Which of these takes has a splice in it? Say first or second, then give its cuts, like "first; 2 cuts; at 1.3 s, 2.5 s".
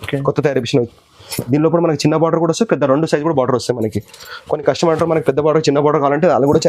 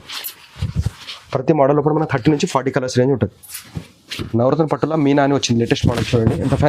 second; 1 cut; at 4.1 s